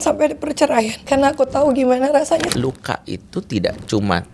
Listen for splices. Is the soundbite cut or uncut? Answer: cut